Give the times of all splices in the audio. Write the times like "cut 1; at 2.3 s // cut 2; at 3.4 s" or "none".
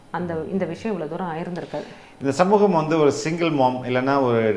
none